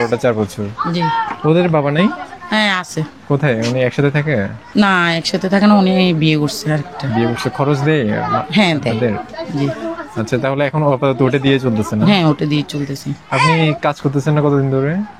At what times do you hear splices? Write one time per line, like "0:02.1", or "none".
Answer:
none